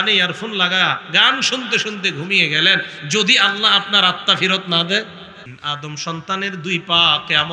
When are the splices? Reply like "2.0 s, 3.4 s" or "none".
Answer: 5.6 s